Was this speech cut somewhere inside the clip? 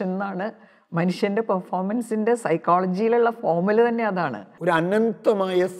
yes; 1 cut; at 4.5 s

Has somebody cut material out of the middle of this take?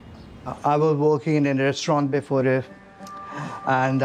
no; 0 cuts

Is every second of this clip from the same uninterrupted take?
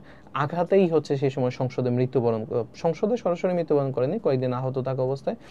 yes; 0 cuts

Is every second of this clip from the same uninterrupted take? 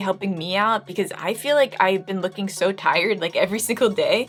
yes; 0 cuts

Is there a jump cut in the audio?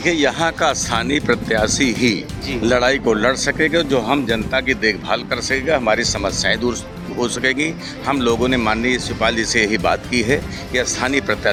no; 0 cuts

